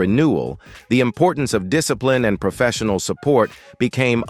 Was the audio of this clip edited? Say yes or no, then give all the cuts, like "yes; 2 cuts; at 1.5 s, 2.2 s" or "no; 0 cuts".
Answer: no; 0 cuts